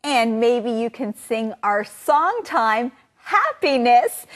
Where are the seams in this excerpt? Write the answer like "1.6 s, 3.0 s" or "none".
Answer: 3.5 s